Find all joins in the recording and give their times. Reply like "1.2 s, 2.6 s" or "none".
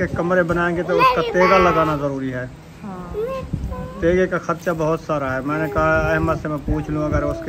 none